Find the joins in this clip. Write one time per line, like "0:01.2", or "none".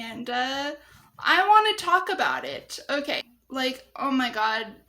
0:02.9